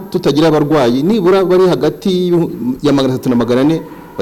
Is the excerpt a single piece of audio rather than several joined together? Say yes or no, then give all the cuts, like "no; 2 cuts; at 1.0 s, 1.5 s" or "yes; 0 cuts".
yes; 0 cuts